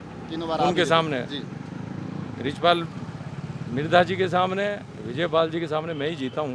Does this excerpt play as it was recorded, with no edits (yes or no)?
yes